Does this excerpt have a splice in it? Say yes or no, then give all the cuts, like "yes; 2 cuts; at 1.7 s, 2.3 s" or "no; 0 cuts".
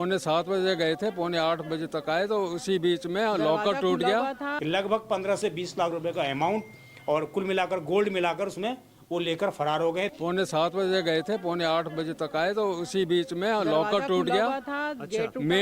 yes; 2 cuts; at 4.5 s, 10.1 s